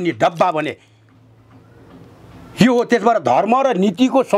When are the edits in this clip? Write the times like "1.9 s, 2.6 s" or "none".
none

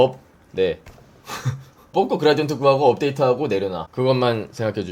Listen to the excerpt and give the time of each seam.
1.9 s, 3.8 s

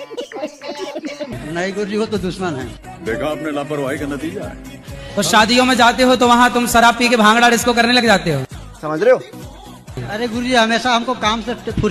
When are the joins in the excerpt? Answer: none

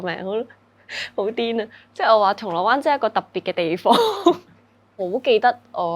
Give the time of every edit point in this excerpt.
4.9 s

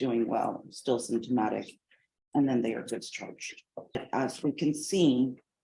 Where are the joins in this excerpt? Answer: 3.9 s

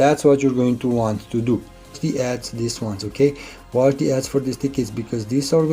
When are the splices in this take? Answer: 1.9 s

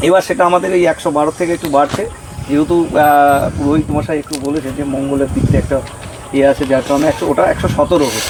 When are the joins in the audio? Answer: none

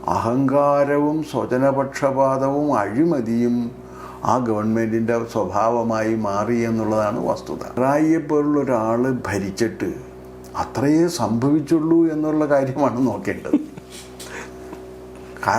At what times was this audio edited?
7.8 s

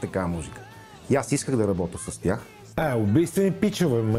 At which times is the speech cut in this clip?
2.6 s

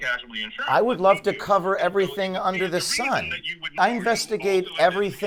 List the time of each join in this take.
none

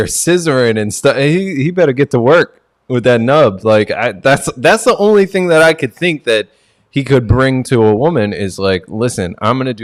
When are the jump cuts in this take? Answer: none

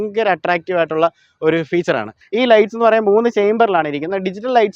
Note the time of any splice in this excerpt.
2.2 s

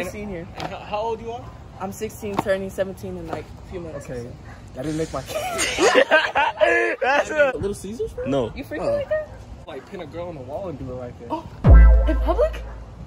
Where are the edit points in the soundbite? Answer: 7.5 s, 9.5 s

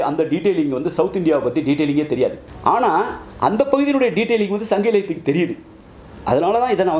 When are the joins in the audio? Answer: 2.5 s

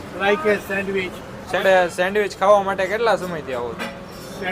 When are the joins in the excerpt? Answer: 1.6 s

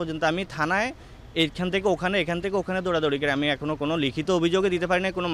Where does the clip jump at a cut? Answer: none

